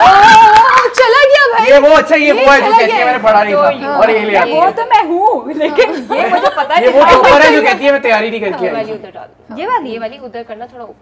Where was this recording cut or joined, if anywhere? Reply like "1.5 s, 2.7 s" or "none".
none